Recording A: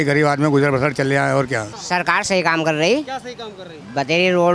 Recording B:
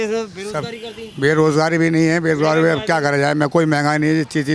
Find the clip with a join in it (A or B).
A